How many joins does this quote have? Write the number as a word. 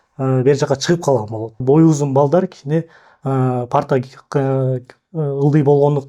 one